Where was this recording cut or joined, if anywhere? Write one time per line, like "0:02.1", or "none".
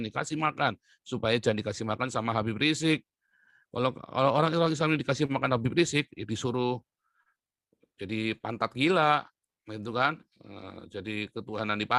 none